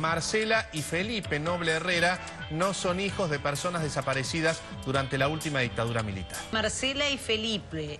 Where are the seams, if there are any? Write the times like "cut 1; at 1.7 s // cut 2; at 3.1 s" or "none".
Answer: cut 1; at 6.5 s